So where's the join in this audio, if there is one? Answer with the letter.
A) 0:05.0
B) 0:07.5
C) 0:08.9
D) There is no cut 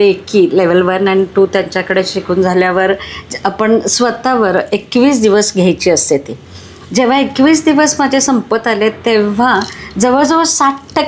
D